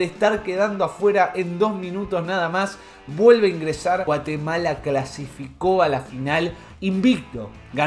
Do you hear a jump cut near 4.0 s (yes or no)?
yes